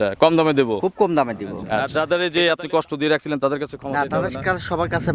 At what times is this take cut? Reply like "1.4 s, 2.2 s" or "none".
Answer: 1.9 s